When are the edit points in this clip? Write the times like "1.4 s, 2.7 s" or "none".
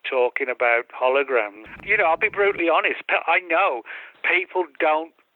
1.8 s